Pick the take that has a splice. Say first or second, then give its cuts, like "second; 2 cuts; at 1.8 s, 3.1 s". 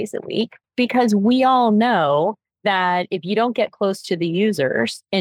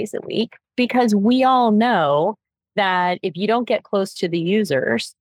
first; 1 cut; at 2.5 s